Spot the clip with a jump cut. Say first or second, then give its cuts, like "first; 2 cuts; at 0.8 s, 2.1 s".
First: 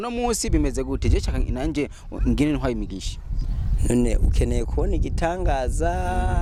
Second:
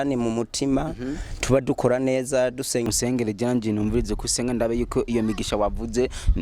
second; 1 cut; at 2.8 s